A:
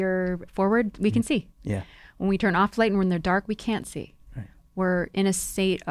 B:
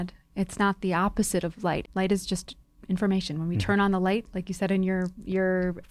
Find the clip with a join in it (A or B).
B